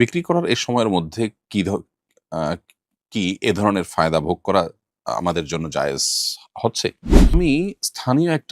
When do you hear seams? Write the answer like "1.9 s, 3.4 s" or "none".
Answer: 7.3 s